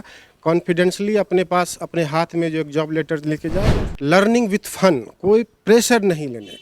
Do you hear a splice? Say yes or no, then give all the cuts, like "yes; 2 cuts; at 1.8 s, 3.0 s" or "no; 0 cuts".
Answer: yes; 1 cut; at 3.8 s